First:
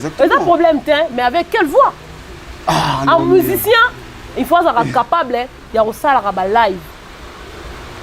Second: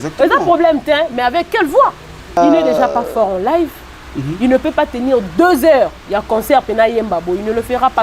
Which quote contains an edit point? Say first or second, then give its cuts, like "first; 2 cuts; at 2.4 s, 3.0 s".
second; 1 cut; at 2.4 s